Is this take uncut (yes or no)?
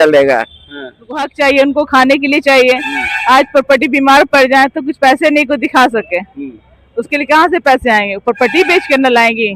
no